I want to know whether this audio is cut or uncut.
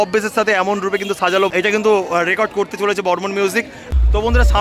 uncut